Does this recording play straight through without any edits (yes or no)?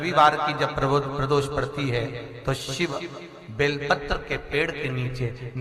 yes